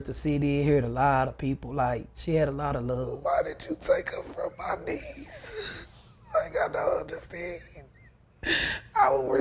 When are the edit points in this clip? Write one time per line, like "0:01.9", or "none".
0:03.2